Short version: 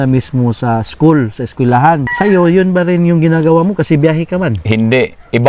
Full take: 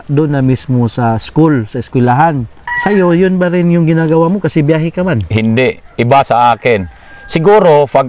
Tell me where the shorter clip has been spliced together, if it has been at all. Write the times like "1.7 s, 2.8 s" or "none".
2.1 s